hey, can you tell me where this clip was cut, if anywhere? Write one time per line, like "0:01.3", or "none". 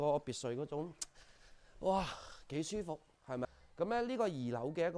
0:03.4